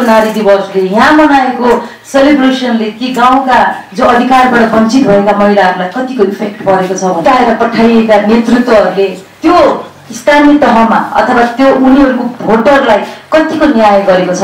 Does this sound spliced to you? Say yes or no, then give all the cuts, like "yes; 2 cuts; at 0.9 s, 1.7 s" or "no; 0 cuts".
yes; 2 cuts; at 7.2 s, 9.2 s